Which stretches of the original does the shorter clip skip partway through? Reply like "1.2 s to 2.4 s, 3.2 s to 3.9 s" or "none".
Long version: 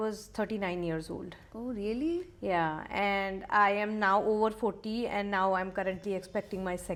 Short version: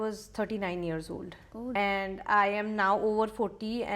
1.7 s to 3.0 s